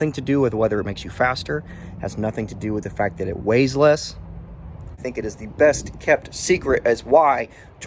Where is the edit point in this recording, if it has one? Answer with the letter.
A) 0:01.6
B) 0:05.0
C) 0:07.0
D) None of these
B